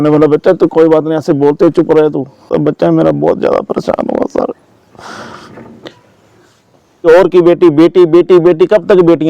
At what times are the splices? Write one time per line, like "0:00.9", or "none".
0:02.5
0:07.1